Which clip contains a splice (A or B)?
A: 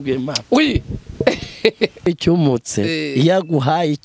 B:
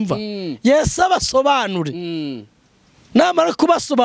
A